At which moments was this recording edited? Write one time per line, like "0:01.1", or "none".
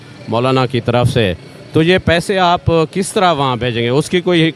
none

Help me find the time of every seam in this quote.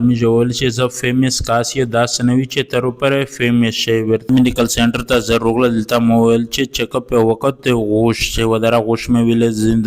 0:04.3

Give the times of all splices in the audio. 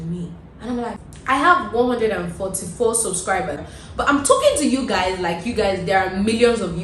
0:01.1
0:03.6

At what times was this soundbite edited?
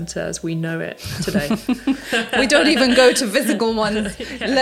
none

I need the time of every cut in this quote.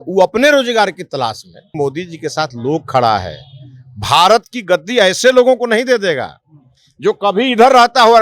0:01.7

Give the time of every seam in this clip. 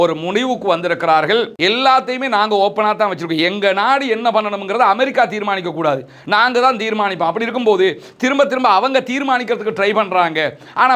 0:01.5

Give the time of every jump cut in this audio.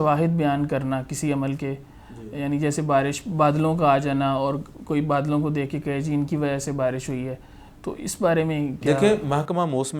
none

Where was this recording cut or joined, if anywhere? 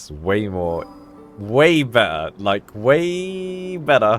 none

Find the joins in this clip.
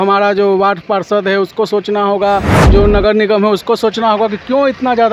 none

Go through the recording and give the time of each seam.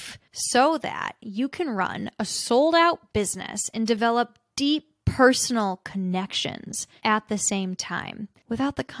none

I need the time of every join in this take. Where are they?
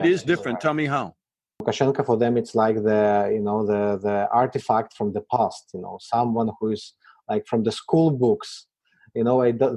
0:01.6

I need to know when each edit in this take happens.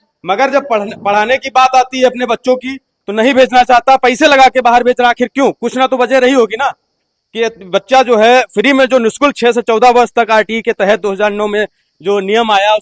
none

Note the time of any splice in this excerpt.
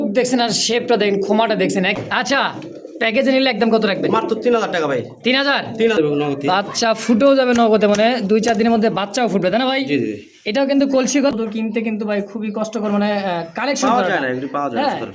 0:02.0
0:06.0
0:11.3

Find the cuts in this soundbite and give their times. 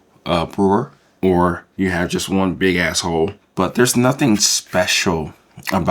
0:01.0
0:03.4

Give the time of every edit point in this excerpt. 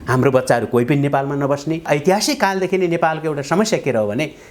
0:01.9

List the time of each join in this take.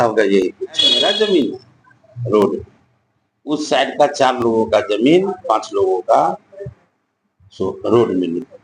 0:00.9

